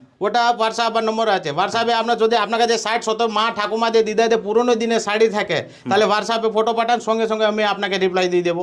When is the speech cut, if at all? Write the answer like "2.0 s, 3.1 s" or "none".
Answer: none